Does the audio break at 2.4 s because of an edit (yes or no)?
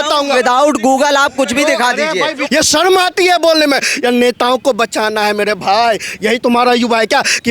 yes